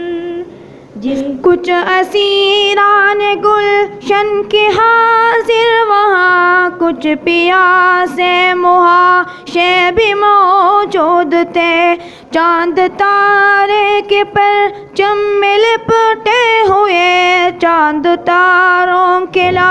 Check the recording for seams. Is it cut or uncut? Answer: cut